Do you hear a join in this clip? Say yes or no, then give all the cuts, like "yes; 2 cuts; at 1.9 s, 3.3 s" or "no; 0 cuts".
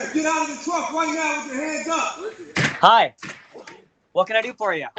yes; 1 cut; at 2.4 s